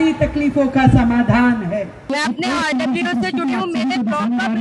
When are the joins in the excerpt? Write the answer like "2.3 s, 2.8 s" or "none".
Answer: 2.1 s

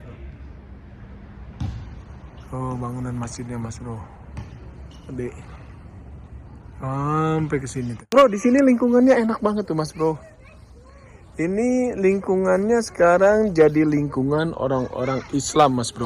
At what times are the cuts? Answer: 8.1 s

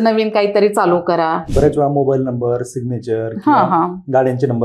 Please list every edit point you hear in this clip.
1.4 s

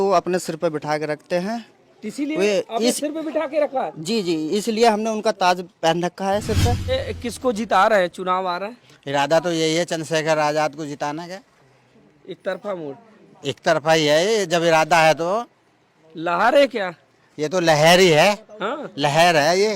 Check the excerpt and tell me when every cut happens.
6.9 s

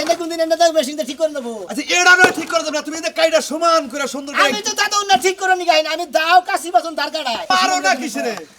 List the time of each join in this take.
7.5 s

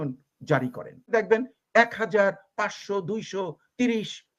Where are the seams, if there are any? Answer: 1.1 s

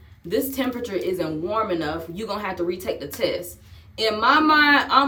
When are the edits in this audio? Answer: none

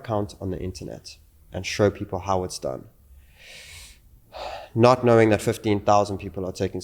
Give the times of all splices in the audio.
none

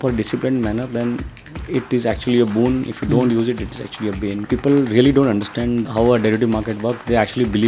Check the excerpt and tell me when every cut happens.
4.5 s

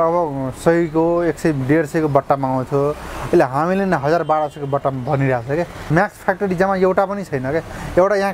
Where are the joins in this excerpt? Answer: 5.9 s

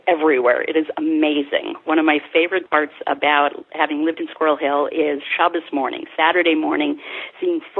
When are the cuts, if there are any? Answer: 2.7 s

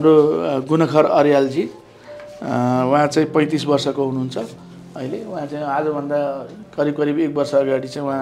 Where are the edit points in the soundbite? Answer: none

